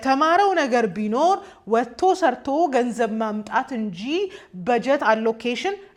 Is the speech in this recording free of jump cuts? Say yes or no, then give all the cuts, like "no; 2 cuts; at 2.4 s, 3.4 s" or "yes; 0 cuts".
yes; 0 cuts